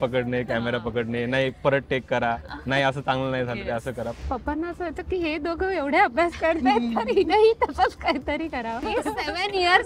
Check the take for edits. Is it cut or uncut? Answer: cut